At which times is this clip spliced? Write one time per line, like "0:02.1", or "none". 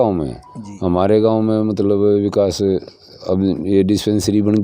none